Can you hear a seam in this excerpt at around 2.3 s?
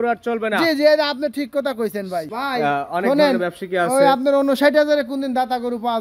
yes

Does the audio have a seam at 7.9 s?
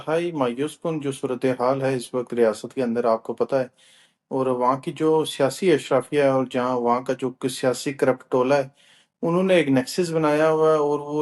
no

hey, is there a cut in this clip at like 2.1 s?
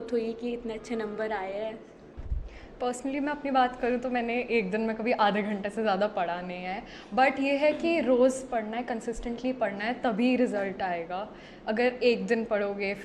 yes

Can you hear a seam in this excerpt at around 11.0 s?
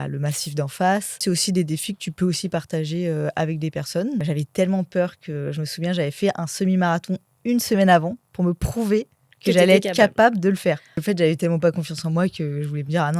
yes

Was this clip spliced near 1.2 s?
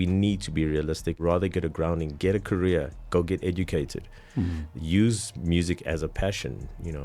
yes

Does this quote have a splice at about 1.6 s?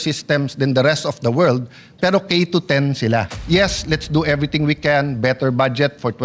no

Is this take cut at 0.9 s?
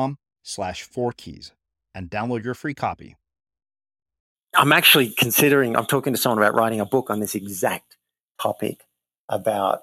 no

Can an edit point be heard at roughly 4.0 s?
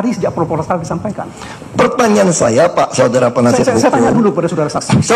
no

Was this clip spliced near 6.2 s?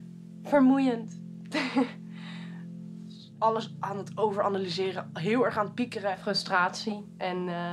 yes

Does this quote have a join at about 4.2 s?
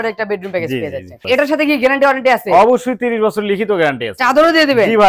yes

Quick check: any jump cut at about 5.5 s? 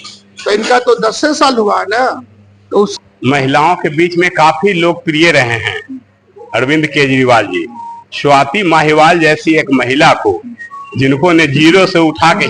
no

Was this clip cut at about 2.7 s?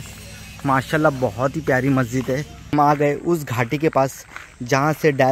yes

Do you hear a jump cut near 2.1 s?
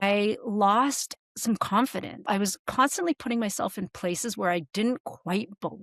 yes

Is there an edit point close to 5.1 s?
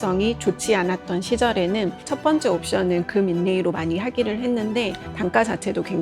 yes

